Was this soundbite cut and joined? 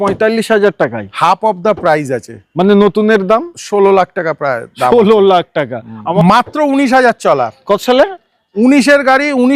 yes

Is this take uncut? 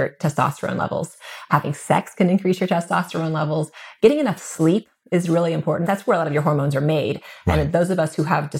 no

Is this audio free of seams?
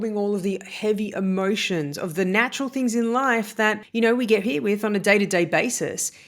no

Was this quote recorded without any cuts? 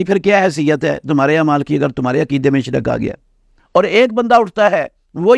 no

